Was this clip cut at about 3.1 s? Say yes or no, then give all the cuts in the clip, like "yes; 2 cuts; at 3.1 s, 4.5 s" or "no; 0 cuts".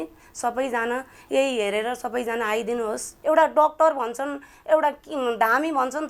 yes; 1 cut; at 3.1 s